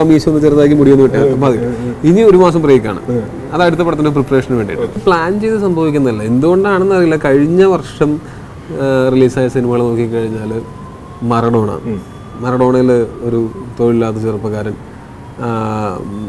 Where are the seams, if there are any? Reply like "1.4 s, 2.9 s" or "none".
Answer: 5.0 s